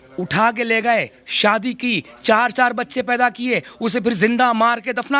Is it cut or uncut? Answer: uncut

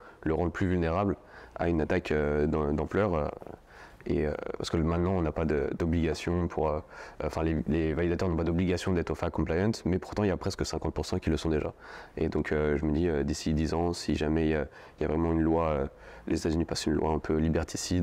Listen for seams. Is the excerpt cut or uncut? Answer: uncut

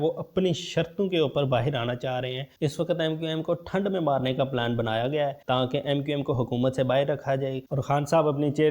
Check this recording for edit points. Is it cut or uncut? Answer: cut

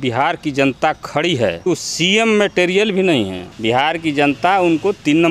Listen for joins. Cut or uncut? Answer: cut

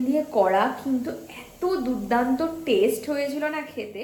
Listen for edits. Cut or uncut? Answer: uncut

